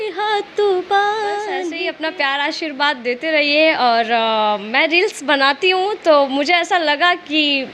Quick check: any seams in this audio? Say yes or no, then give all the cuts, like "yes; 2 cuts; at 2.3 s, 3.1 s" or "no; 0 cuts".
yes; 1 cut; at 1.7 s